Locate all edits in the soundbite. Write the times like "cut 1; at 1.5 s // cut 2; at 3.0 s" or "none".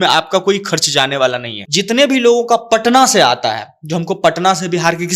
cut 1; at 1.6 s